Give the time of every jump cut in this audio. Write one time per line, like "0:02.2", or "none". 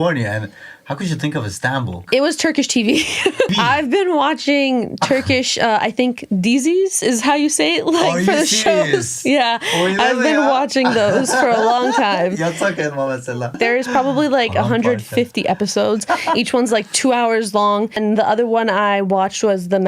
0:02.0
0:03.5
0:13.6
0:18.0